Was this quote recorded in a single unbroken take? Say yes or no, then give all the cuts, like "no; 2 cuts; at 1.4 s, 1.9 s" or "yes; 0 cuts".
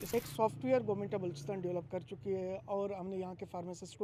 yes; 0 cuts